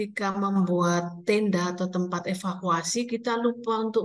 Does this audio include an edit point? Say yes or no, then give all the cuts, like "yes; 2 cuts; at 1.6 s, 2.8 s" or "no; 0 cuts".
no; 0 cuts